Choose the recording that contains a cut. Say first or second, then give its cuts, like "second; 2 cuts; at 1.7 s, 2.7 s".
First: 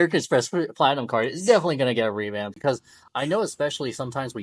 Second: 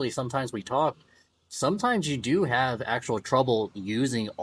first; 1 cut; at 2.5 s